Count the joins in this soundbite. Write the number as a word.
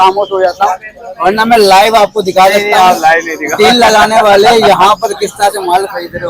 zero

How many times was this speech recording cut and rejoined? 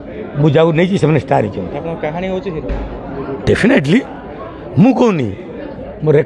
zero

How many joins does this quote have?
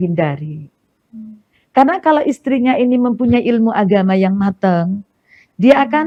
zero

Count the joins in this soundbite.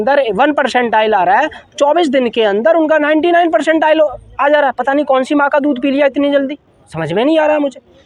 zero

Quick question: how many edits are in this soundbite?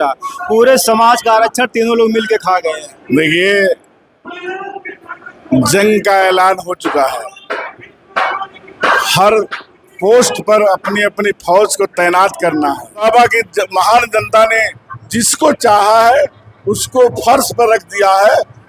two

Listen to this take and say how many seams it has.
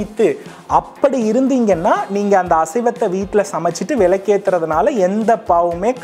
zero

